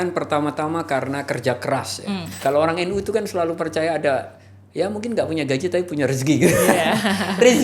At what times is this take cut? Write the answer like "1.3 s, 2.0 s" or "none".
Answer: 2.3 s